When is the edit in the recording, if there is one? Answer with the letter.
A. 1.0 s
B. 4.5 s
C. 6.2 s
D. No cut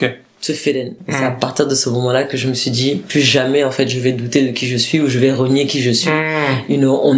A